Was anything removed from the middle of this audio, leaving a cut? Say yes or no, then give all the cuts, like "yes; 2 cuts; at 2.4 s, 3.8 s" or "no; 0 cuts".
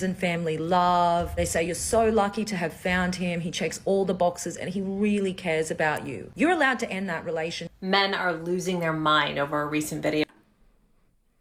no; 0 cuts